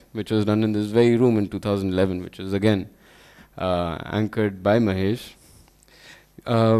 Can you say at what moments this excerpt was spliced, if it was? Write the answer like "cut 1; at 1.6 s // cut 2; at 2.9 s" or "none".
cut 1; at 5.4 s